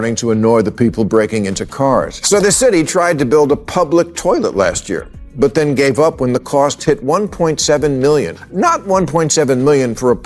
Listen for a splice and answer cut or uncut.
cut